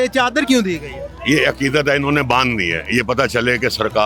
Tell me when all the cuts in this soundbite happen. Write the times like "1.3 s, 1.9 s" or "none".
none